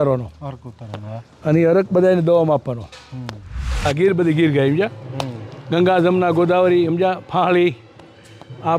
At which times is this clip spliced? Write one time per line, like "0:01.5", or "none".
0:03.9